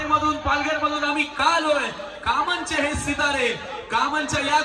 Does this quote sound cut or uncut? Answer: uncut